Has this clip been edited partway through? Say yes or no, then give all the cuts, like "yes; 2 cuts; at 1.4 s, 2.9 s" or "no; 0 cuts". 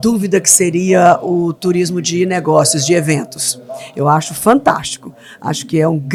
no; 0 cuts